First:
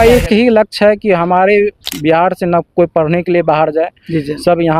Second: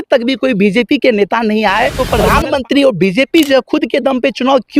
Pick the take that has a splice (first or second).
second